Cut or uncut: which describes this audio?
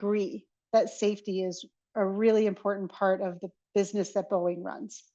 uncut